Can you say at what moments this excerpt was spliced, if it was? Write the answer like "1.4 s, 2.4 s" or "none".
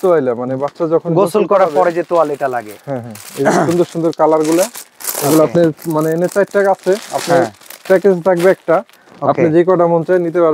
none